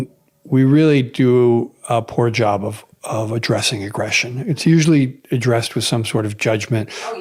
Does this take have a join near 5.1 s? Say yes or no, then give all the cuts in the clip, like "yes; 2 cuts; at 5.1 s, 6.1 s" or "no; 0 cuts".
no; 0 cuts